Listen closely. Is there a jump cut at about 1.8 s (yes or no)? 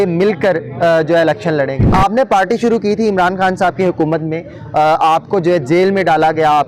yes